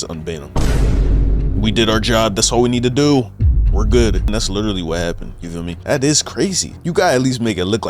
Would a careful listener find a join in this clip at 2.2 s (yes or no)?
no